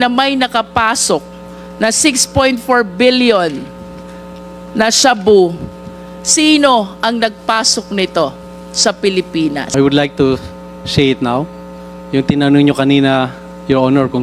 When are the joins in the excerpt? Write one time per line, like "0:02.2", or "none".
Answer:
0:09.7